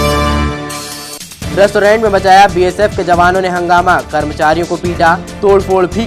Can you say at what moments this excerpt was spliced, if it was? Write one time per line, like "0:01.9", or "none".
0:01.0